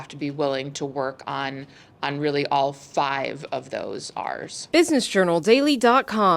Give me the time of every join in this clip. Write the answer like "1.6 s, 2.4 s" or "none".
4.6 s